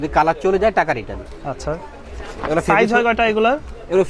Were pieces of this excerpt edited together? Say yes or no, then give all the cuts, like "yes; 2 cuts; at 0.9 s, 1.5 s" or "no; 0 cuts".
no; 0 cuts